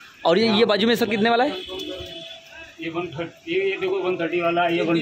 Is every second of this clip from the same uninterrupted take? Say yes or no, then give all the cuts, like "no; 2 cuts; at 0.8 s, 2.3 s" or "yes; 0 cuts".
yes; 0 cuts